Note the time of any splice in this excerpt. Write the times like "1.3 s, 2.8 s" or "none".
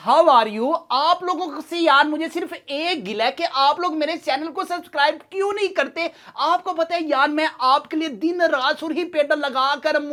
none